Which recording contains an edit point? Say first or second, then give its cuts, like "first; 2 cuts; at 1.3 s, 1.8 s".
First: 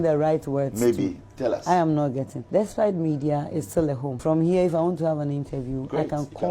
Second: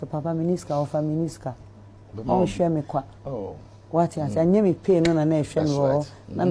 first; 2 cuts; at 2.3 s, 4.1 s